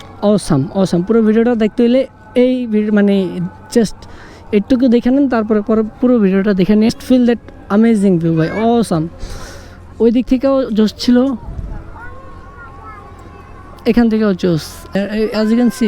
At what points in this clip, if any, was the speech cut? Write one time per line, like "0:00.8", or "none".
0:06.9
0:14.9